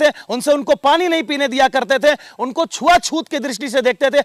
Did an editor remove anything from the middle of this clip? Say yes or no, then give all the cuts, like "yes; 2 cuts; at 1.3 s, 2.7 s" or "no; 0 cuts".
no; 0 cuts